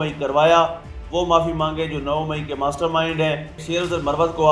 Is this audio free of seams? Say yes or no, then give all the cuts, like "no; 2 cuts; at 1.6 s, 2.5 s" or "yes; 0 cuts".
no; 1 cut; at 3.6 s